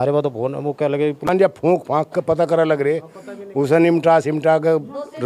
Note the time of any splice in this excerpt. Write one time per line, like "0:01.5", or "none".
0:01.5